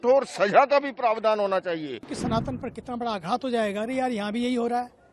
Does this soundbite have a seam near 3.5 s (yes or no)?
no